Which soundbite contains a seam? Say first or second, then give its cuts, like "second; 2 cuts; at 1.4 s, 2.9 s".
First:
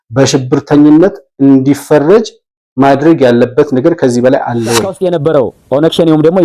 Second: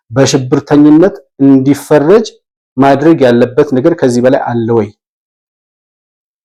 first; 1 cut; at 4.9 s